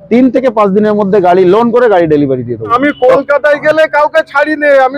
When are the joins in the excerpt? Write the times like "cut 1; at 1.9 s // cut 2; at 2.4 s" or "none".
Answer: cut 1; at 2.7 s

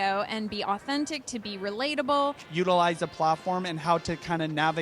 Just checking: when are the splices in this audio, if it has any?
cut 1; at 2.4 s // cut 2; at 3.8 s

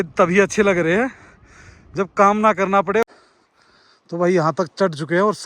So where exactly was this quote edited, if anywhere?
cut 1; at 3.1 s

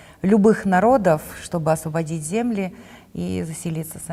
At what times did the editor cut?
none

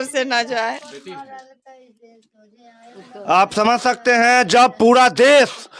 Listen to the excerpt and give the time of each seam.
none

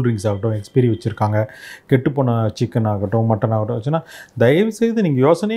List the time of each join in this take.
none

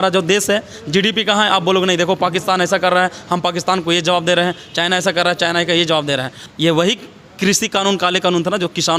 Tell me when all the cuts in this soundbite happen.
cut 1; at 6.4 s

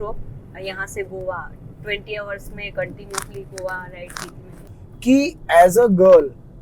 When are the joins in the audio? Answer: cut 1; at 4.7 s

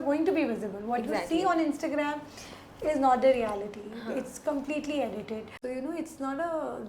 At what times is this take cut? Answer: cut 1; at 5.5 s

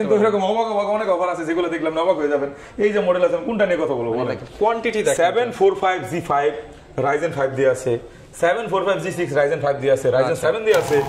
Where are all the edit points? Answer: none

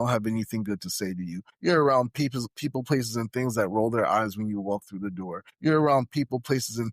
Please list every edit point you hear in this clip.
cut 1; at 1.5 s // cut 2; at 5.4 s

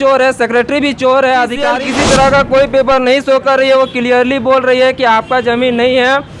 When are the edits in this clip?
cut 1; at 1.7 s

